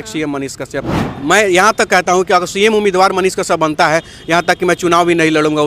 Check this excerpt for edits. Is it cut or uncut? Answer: cut